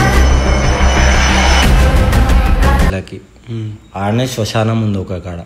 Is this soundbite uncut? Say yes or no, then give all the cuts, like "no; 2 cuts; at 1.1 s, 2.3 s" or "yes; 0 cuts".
no; 1 cut; at 2.9 s